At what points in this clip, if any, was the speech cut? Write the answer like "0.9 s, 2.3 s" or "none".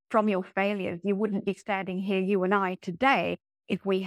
none